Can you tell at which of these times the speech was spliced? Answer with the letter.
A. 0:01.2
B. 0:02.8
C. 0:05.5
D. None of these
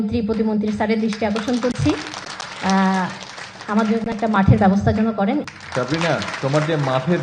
C